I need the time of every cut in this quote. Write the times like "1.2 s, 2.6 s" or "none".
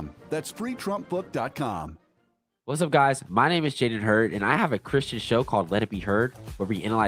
2.7 s